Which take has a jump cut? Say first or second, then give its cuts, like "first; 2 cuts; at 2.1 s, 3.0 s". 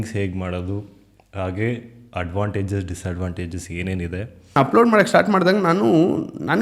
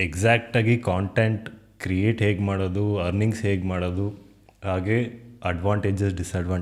first; 1 cut; at 4.6 s